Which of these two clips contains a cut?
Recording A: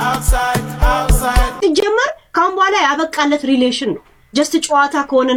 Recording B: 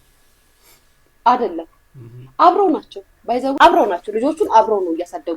B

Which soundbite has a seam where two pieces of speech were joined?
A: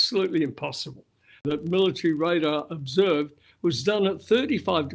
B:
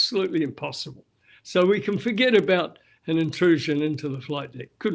A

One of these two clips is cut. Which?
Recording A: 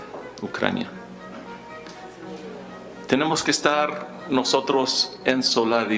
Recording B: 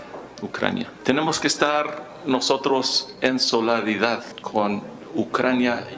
B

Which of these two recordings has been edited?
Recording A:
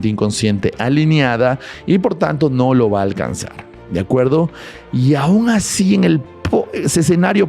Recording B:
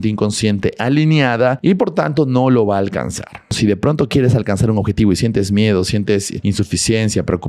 B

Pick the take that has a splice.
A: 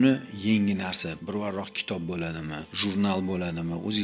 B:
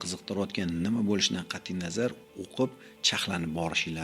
A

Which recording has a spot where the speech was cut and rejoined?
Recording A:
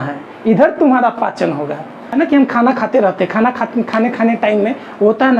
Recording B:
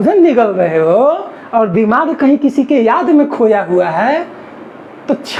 A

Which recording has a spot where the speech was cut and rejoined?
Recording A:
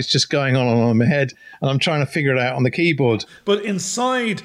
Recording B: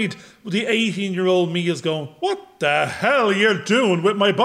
A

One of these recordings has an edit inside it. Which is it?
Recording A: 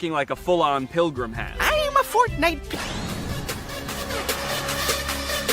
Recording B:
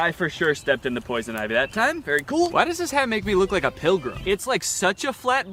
A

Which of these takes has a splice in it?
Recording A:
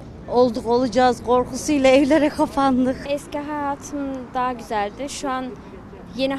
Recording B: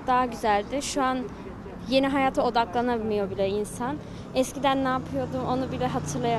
A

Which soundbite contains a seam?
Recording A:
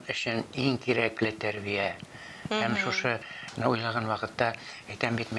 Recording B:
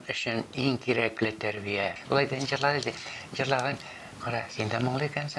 B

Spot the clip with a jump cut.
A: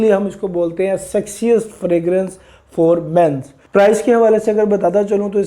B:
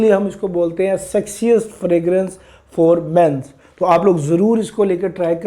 A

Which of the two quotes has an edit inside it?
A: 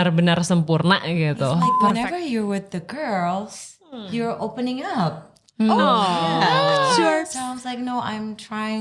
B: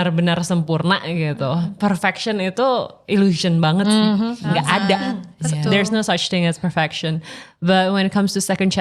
A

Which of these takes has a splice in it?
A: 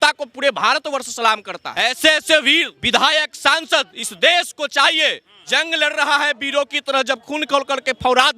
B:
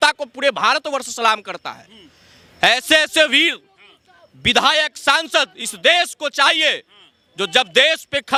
A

